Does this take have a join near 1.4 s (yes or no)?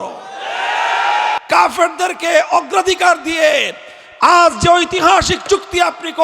yes